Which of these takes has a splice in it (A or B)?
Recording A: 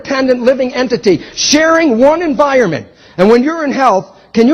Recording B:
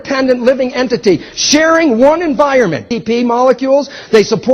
A